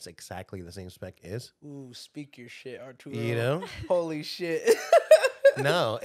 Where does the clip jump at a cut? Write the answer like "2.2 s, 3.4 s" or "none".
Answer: none